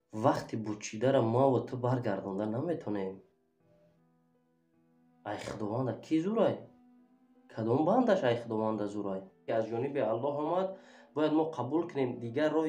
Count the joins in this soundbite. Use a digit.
1